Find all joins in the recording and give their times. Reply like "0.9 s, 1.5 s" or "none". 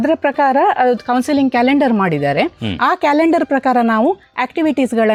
none